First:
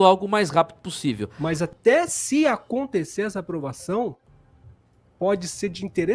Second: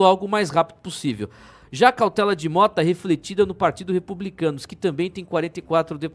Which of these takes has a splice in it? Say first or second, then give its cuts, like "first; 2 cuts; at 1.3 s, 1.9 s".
first; 1 cut; at 1.3 s